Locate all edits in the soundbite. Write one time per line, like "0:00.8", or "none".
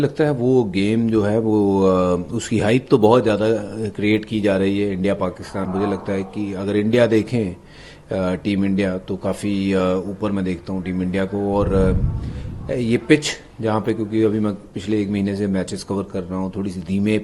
0:05.7